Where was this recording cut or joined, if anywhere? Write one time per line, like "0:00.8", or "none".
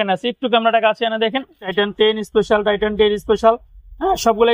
0:01.7